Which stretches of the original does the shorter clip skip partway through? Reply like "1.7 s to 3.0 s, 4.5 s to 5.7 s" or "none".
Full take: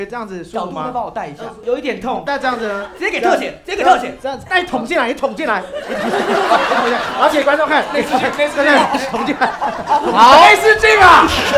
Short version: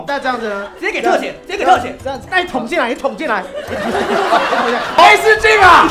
7.2 s to 10.4 s